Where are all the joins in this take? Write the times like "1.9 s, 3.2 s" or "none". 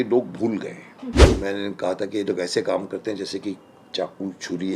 1.3 s